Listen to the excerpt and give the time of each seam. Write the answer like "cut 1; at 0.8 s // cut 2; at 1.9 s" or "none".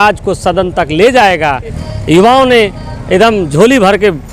cut 1; at 1.8 s